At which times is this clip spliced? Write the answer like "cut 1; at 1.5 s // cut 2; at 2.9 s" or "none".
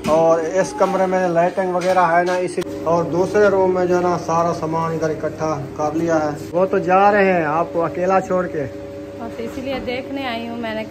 cut 1; at 2.6 s // cut 2; at 6.5 s